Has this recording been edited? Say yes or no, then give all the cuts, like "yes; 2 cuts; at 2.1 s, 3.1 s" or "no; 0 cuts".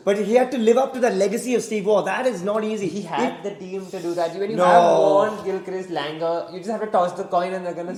no; 0 cuts